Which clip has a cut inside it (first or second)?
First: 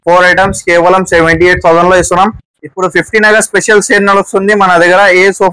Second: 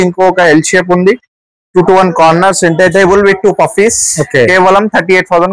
first